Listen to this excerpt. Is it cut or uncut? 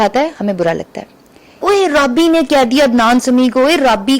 cut